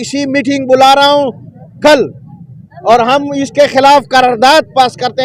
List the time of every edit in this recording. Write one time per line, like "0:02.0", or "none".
none